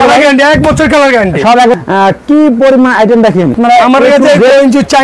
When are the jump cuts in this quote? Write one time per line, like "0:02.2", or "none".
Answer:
0:01.8
0:03.6